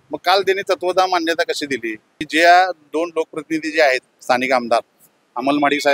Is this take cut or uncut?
cut